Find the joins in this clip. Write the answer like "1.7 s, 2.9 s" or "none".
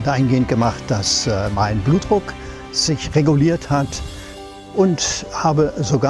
4.4 s